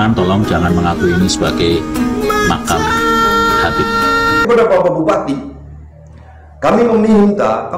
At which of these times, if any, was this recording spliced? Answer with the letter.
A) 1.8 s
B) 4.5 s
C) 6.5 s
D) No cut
B